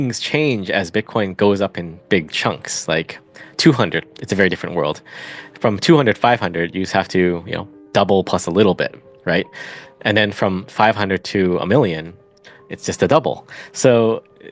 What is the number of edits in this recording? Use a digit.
0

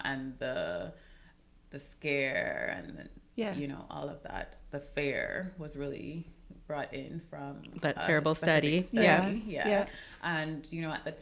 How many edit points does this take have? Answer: 0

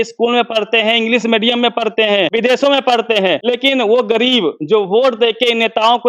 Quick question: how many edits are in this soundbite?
2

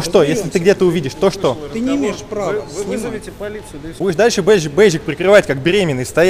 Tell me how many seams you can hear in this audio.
1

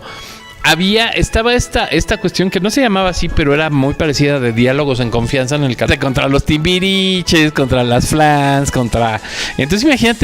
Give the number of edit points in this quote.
1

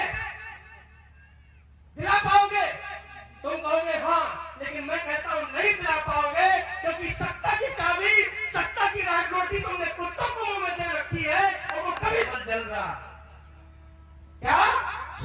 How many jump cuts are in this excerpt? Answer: 1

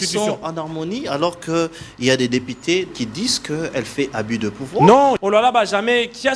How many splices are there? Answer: 2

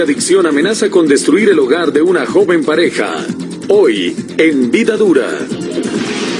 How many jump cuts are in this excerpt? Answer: 0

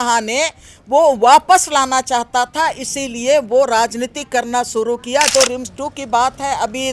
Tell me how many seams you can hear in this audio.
1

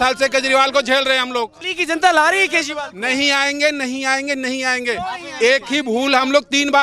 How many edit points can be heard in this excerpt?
1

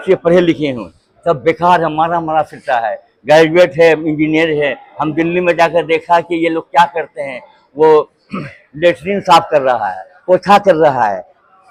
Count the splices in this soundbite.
0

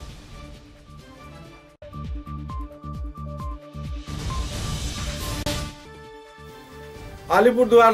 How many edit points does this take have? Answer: 2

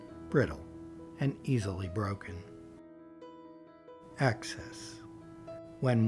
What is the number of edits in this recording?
2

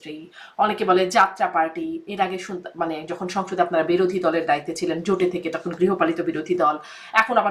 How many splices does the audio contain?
0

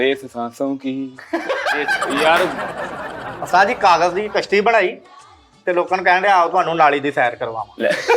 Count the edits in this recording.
1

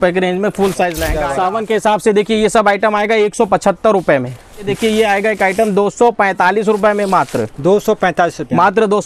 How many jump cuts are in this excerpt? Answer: 2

